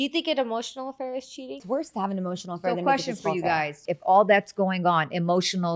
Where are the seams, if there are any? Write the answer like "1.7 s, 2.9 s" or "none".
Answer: 1.6 s, 3.9 s